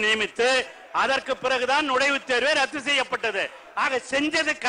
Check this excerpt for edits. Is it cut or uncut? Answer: uncut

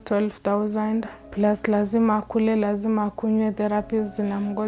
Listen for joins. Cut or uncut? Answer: cut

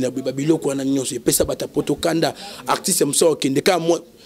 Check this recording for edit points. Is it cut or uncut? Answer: uncut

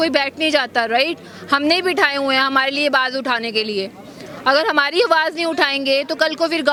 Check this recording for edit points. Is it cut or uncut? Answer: uncut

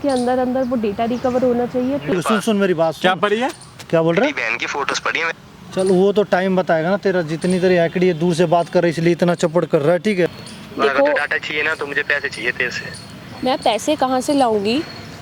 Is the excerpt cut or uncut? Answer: cut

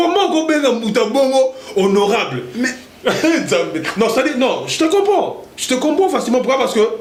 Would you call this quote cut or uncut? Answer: uncut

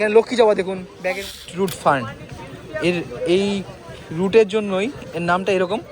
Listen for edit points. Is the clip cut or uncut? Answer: cut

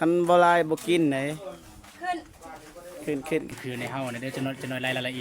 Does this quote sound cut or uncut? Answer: cut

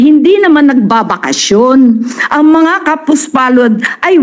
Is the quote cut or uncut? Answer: uncut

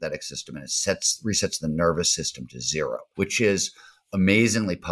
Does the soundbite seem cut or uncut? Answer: cut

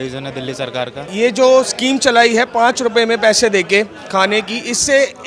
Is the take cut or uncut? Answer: cut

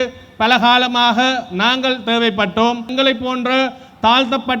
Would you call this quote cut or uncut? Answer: cut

